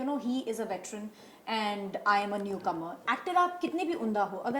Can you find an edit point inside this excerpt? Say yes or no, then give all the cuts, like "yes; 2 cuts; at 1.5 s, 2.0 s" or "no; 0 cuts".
yes; 1 cut; at 3.0 s